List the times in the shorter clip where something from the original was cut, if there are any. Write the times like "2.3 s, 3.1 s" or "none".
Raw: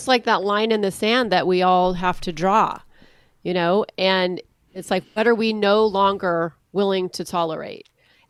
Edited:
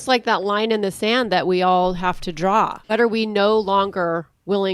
2.8 s